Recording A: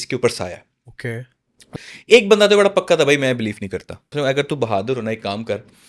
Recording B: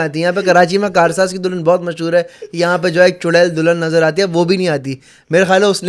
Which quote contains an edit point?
A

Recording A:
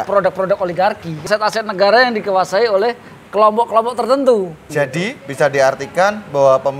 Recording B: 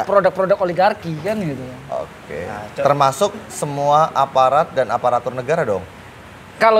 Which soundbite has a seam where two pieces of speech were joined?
A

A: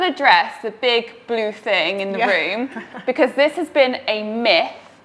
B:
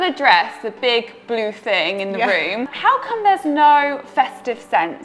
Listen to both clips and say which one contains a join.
B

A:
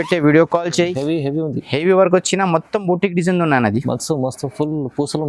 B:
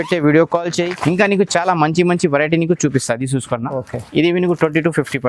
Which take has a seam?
A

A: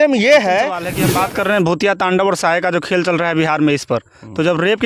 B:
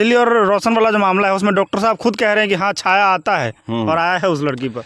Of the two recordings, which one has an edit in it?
A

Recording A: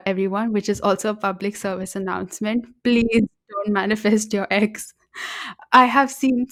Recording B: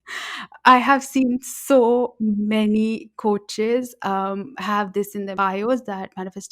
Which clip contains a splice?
B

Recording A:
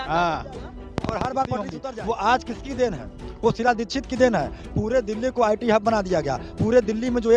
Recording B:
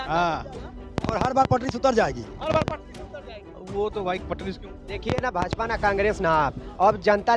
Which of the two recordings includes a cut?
A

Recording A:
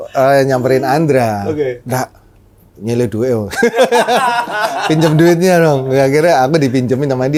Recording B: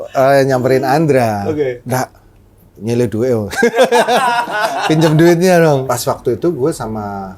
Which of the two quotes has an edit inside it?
B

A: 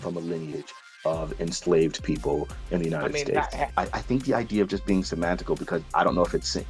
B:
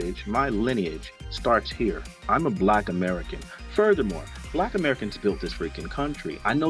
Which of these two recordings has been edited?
A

